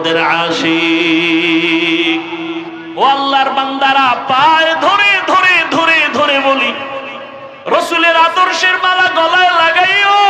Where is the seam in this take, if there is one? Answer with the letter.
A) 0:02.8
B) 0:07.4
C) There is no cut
A